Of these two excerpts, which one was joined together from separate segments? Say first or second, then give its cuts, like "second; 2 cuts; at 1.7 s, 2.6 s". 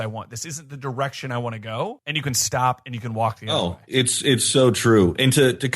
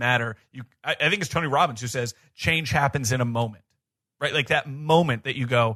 first; 2 cuts; at 2.0 s, 3.4 s